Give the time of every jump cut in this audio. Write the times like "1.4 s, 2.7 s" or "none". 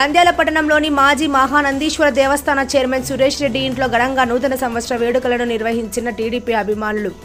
none